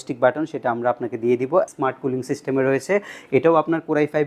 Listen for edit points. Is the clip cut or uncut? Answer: cut